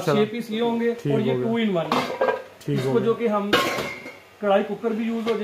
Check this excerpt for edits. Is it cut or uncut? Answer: cut